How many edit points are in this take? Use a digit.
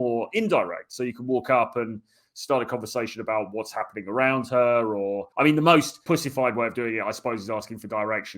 2